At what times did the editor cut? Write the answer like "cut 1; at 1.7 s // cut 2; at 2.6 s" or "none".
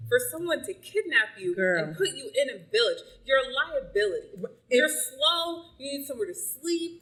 none